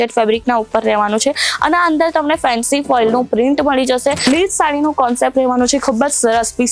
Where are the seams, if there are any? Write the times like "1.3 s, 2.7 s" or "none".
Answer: 4.2 s